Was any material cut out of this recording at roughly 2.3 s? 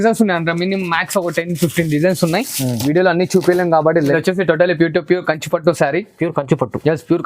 no; 1 cut; at 4.1 s

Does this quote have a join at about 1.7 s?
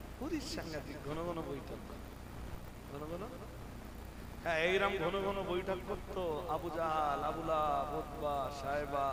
no; 0 cuts

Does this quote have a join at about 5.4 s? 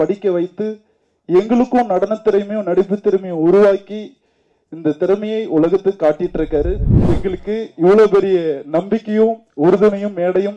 no; 1 cut; at 6.9 s

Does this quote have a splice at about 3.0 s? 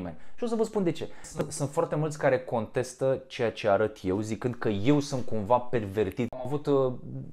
no; 2 cuts; at 1.3 s, 6.4 s

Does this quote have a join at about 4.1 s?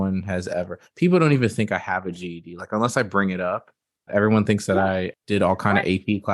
yes; 2 cuts; at 4.1 s, 5.1 s

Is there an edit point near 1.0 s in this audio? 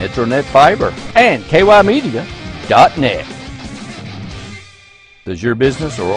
yes; 1 cut; at 1.0 s

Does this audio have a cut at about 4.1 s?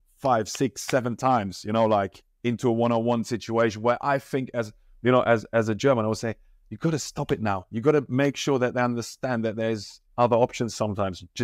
no; 0 cuts

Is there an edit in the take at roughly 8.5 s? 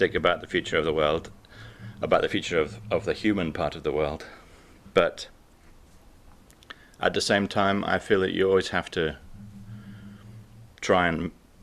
no; 1 cut; at 2.9 s

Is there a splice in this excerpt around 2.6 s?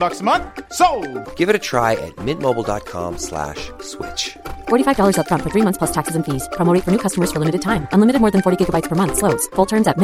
no; 0 cuts

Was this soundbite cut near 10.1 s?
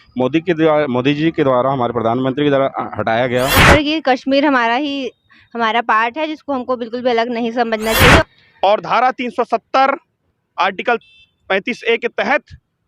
no; 2 cuts; at 3.6 s, 8.2 s

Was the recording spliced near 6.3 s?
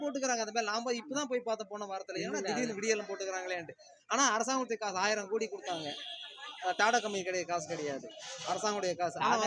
no; 0 cuts

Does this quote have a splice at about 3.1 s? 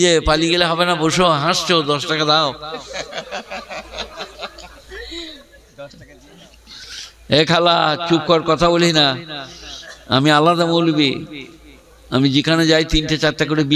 no; 1 cut; at 6.1 s

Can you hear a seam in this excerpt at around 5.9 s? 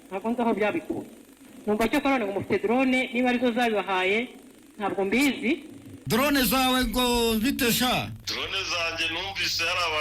yes; 2 cuts; at 5.9 s, 8.2 s

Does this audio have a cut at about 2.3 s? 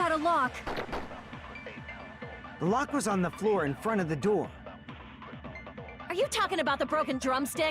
no; 2 cuts; at 4.5 s, 6.1 s

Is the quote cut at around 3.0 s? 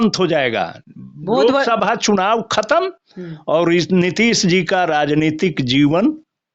no; 0 cuts

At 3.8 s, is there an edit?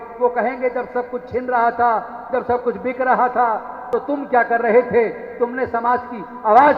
yes; 1 cut; at 3.8 s

